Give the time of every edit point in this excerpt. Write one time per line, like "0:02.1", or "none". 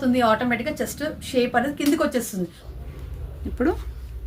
0:02.6